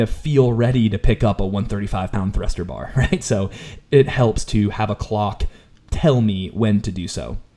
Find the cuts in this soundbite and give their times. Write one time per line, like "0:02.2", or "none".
none